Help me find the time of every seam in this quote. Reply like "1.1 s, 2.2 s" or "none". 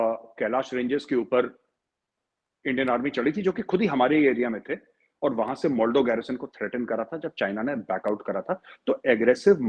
none